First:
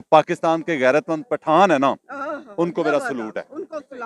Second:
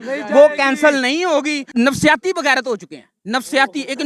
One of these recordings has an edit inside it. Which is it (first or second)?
second